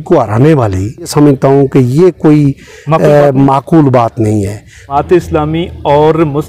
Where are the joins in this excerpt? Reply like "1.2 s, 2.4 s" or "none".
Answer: 1.1 s, 4.8 s